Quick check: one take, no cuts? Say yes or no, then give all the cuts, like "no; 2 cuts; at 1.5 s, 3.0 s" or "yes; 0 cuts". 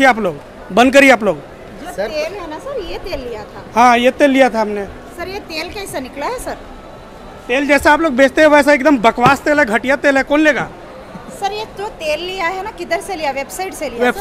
yes; 0 cuts